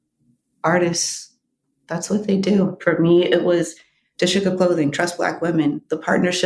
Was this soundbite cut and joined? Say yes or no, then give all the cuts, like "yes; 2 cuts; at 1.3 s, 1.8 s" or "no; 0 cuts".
yes; 1 cut; at 2.8 s